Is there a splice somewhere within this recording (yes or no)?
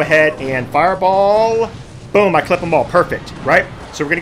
no